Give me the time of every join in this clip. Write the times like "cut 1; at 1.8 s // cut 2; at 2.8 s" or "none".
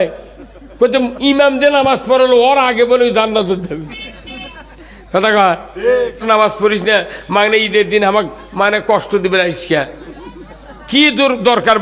cut 1; at 6.2 s